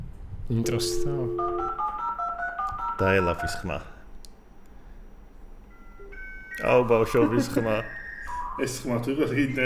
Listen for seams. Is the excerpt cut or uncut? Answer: uncut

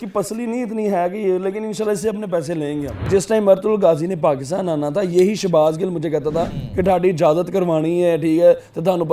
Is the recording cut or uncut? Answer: cut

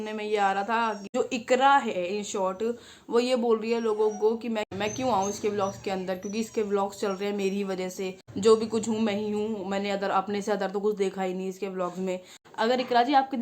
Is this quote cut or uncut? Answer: cut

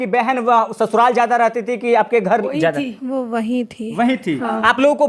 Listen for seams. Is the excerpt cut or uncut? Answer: uncut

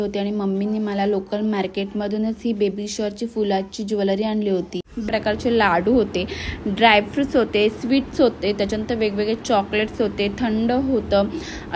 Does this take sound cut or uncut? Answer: cut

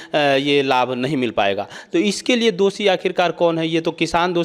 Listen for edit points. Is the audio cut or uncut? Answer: uncut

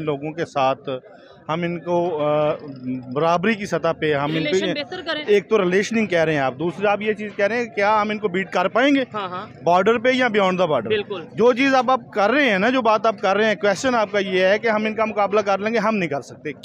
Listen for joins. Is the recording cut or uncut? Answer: uncut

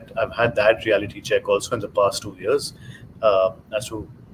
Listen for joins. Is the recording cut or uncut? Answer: uncut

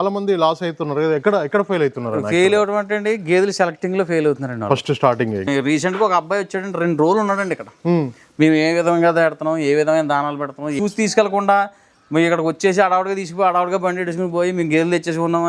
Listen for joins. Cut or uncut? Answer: cut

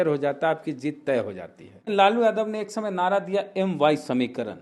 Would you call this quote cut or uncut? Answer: cut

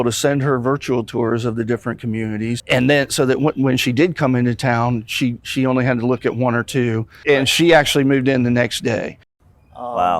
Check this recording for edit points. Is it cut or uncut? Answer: cut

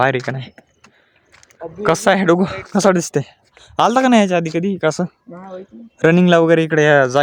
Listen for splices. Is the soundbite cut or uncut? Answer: uncut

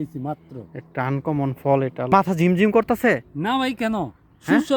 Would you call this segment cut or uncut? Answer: cut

